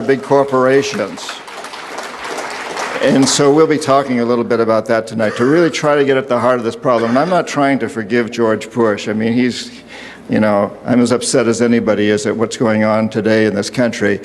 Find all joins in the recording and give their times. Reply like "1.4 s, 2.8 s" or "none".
4.8 s